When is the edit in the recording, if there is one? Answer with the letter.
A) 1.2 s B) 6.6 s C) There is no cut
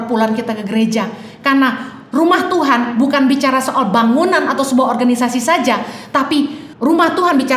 B